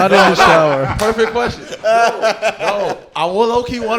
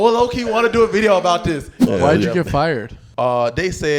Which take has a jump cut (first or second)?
second